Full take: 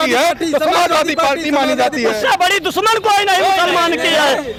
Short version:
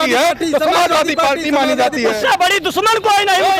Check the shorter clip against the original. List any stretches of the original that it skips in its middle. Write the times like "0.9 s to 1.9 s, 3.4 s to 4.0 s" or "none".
none